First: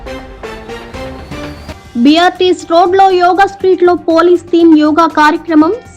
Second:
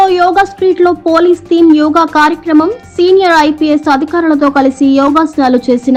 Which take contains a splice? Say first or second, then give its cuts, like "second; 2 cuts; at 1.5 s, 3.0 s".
first; 1 cut; at 1.8 s